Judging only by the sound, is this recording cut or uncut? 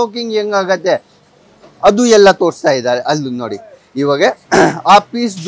uncut